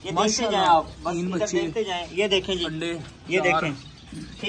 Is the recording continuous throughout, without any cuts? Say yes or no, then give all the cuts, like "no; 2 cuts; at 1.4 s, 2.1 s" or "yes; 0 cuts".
yes; 0 cuts